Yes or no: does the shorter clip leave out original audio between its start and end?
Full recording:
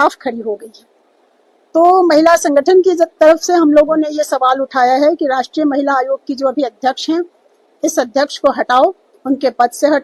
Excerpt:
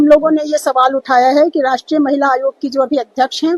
no